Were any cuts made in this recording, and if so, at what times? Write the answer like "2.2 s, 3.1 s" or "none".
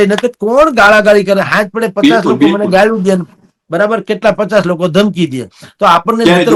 none